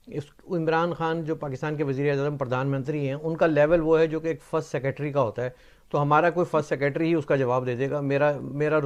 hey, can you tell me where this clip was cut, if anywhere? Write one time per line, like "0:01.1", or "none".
none